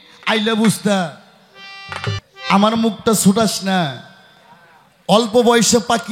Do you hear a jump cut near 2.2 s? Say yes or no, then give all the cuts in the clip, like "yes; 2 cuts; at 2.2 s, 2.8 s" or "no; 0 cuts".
yes; 1 cut; at 2.2 s